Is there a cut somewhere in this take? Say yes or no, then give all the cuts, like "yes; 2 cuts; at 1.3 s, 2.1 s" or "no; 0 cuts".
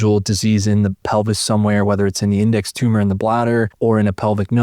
yes; 1 cut; at 3.7 s